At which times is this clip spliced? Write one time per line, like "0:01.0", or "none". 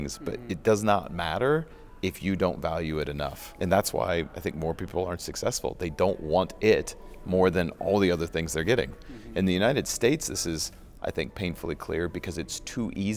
none